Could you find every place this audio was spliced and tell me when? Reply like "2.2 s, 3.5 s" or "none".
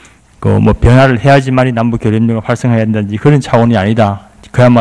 none